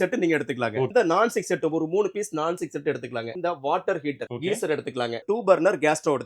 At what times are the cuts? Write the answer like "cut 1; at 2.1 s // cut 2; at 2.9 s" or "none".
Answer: cut 1; at 0.9 s // cut 2; at 3.3 s // cut 3; at 4.3 s // cut 4; at 5.2 s

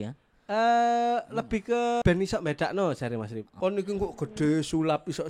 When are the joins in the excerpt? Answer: cut 1; at 2.0 s // cut 2; at 3.4 s

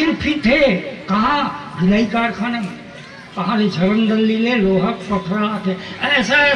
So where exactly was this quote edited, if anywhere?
none

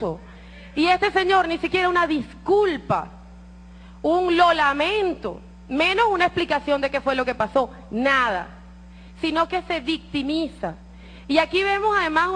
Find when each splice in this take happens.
cut 1; at 4.4 s

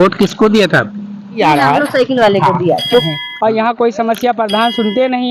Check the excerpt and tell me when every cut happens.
cut 1; at 3.0 s

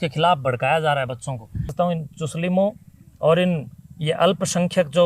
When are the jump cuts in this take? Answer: cut 1; at 1.7 s

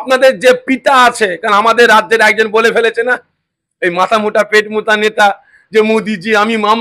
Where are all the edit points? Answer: none

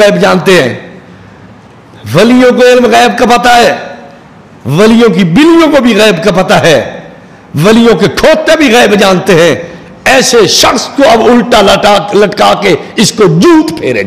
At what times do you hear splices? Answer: none

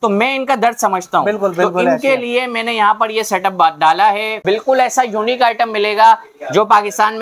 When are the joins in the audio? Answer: cut 1; at 4.4 s

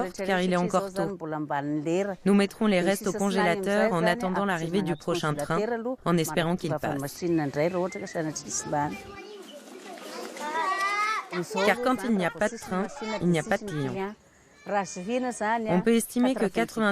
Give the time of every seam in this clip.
none

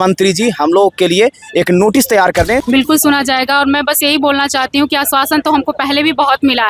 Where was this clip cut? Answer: cut 1; at 2.6 s

